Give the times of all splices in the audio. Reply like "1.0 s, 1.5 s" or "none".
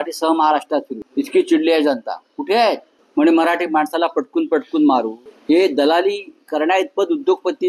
1.0 s, 2.9 s, 5.2 s